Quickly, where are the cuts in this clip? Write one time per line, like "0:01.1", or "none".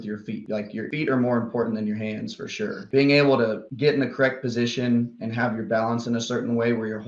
0:00.9
0:02.8